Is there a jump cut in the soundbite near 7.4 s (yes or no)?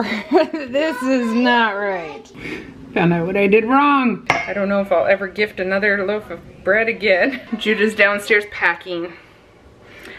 yes